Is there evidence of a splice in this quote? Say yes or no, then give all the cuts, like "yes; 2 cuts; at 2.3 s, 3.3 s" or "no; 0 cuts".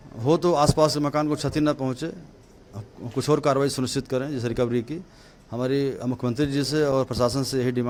no; 0 cuts